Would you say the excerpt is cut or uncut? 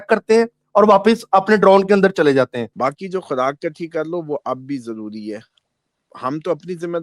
cut